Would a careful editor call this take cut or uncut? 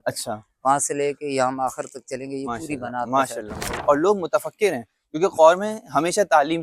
cut